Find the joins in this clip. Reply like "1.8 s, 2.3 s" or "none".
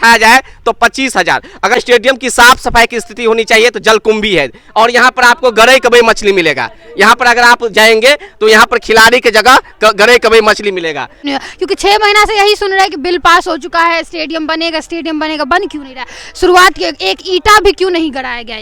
1.8 s, 11.3 s